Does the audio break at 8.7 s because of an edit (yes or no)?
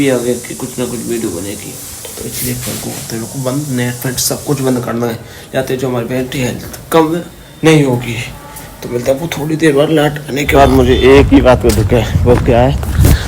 no